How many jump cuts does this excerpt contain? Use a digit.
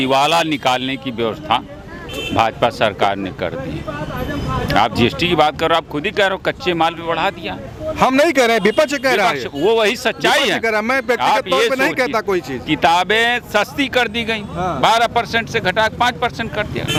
0